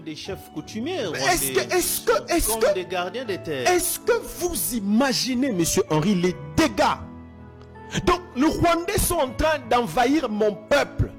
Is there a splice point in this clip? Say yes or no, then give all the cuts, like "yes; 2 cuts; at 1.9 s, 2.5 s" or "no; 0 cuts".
no; 0 cuts